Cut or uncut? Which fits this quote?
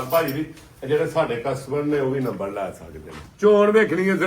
cut